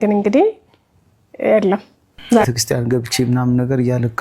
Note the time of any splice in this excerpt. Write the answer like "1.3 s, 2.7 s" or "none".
2.5 s